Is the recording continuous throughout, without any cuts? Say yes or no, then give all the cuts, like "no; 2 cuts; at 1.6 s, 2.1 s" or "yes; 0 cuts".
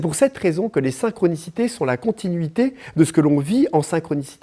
yes; 0 cuts